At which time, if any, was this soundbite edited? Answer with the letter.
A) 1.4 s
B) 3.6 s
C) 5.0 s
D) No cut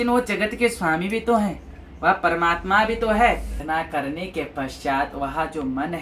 B